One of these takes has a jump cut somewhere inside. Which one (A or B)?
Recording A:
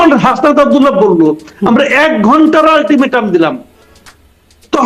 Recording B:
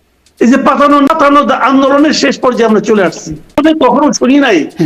B